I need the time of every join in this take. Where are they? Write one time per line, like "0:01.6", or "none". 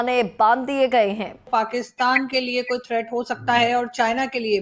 0:01.5